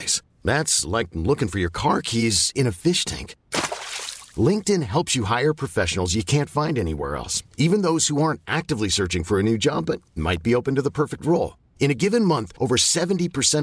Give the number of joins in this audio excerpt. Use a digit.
0